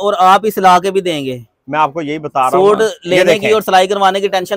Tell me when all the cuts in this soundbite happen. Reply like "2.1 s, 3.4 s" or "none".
none